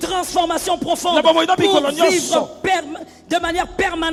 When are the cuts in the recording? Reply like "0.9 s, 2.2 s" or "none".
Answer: none